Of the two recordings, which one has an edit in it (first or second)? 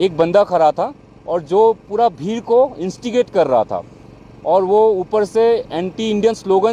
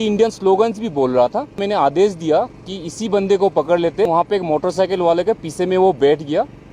second